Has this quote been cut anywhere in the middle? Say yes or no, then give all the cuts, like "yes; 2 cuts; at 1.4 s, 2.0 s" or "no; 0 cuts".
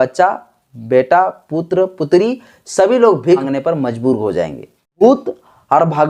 yes; 2 cuts; at 3.4 s, 5.0 s